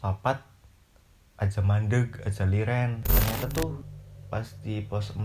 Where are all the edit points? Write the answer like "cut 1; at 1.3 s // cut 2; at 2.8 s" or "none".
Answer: cut 1; at 3.0 s

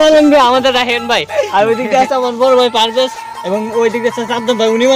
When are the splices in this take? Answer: none

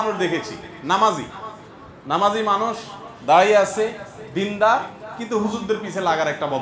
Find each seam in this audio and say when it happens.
none

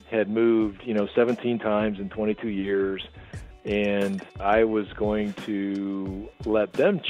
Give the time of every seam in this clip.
cut 1; at 4.4 s

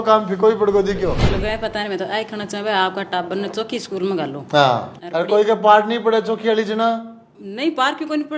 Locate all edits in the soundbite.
cut 1; at 1.2 s // cut 2; at 5.0 s

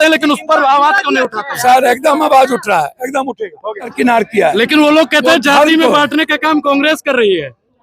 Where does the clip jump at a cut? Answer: cut 1; at 3.9 s

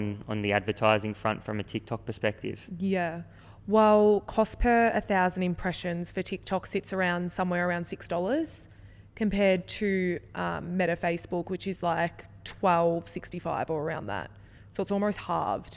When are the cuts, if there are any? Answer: none

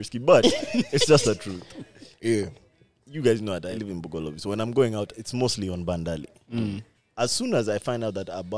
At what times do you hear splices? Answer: cut 1; at 3.8 s // cut 2; at 7.0 s

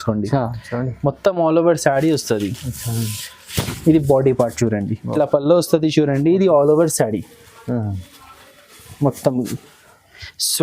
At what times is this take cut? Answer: cut 1; at 5.0 s

